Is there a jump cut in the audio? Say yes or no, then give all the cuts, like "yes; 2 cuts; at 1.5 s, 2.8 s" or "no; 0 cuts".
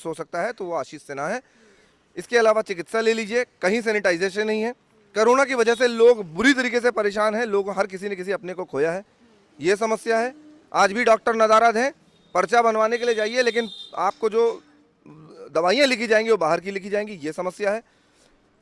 no; 0 cuts